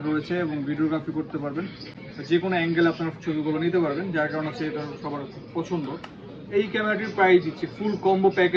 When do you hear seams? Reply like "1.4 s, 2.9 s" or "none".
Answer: none